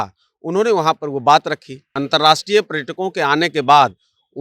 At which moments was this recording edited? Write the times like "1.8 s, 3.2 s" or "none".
1.9 s